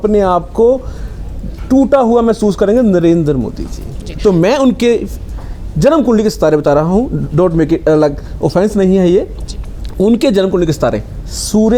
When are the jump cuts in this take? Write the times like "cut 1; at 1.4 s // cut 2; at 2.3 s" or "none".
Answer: none